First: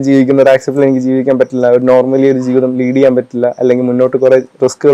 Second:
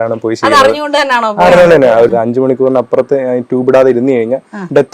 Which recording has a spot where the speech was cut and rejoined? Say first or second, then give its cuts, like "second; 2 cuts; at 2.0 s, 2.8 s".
second; 1 cut; at 2.1 s